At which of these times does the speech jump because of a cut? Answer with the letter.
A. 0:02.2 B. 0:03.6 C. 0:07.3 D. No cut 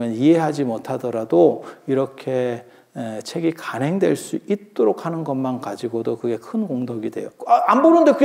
C